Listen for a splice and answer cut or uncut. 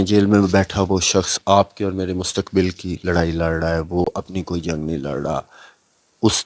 uncut